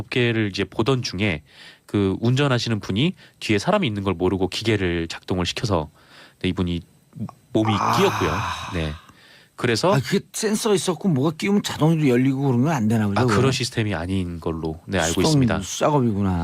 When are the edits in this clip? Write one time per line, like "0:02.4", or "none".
0:06.1